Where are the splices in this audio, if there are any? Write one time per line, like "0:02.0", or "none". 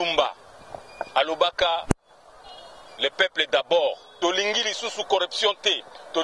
0:04.1

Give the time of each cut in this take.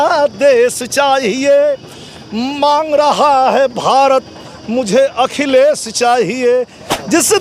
0:06.5

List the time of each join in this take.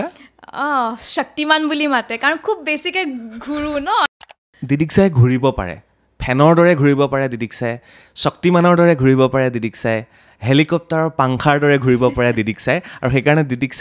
0:04.4

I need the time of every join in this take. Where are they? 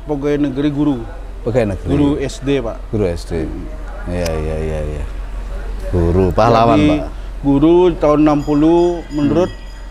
none

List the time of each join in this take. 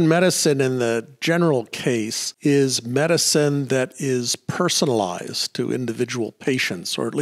0:02.2

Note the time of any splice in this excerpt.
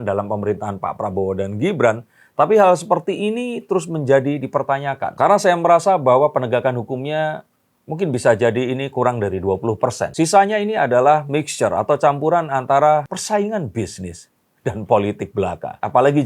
none

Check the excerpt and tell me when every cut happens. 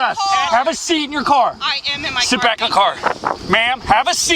0:03.4

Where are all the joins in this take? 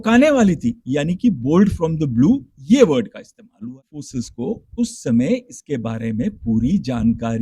0:04.0

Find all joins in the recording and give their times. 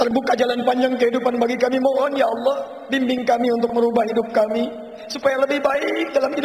none

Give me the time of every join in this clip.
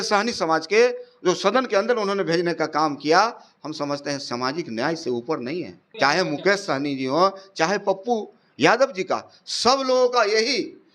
0:05.8

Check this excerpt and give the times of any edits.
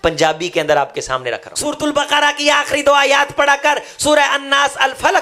0:01.5

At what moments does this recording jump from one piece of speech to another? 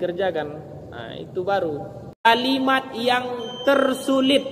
0:02.3

